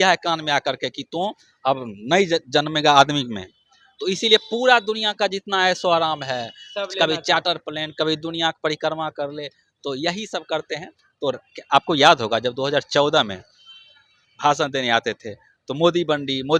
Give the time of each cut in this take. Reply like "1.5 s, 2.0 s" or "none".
none